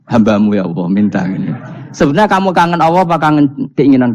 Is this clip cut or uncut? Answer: uncut